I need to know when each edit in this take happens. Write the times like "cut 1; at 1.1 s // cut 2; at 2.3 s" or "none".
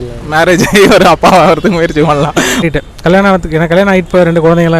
cut 1; at 2.7 s